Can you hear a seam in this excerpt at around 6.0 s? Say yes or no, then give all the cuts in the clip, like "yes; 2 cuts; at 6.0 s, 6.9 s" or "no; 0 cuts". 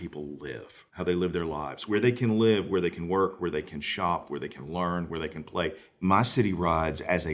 yes; 3 cuts; at 0.9 s, 1.8 s, 6.0 s